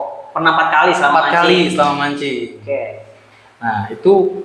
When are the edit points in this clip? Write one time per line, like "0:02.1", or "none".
none